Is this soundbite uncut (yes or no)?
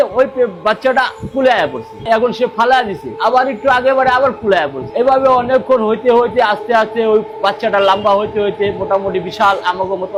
yes